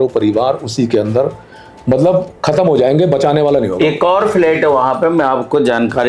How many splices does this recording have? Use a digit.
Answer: 0